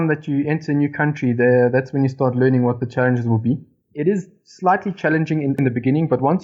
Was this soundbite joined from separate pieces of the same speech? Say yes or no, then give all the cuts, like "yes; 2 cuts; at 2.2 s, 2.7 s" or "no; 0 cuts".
yes; 2 cuts; at 2.8 s, 3.9 s